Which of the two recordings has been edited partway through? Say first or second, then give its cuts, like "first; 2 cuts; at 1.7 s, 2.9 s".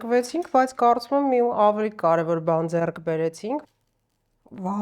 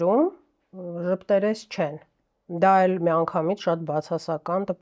first; 1 cut; at 3.6 s